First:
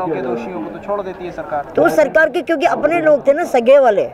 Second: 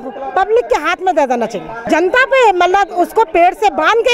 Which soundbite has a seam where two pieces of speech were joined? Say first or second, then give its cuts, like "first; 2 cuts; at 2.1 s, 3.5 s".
second; 1 cut; at 1.8 s